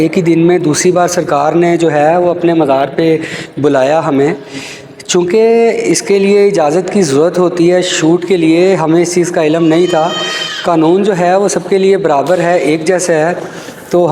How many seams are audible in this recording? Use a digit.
0